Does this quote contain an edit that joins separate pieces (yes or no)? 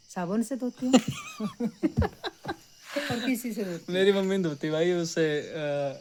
no